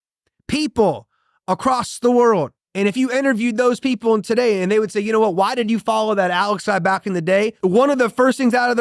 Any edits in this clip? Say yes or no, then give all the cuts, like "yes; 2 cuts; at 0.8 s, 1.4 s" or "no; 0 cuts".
yes; 2 cuts; at 2.6 s, 7.5 s